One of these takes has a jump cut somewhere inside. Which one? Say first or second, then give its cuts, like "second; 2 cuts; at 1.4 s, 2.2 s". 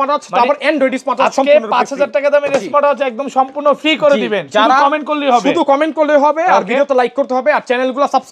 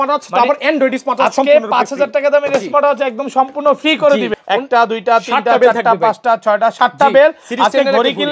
second; 1 cut; at 4.4 s